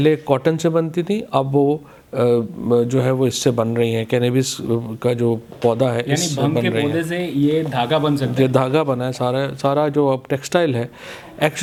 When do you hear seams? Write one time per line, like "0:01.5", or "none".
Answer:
none